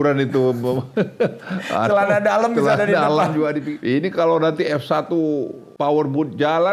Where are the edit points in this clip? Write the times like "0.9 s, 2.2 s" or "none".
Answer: 3.7 s, 5.6 s